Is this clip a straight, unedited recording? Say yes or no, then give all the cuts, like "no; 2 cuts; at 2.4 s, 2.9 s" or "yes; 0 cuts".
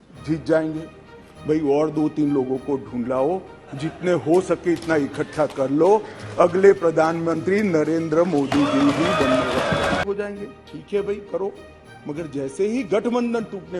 no; 1 cut; at 10.0 s